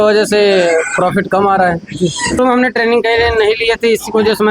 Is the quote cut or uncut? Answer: cut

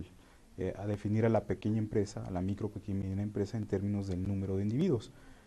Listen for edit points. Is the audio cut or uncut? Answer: uncut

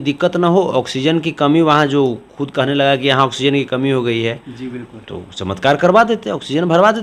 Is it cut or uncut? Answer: uncut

